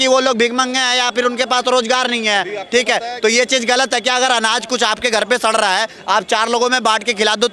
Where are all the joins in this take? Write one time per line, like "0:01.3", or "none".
none